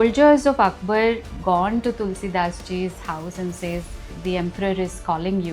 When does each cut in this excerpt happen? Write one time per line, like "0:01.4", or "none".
0:01.3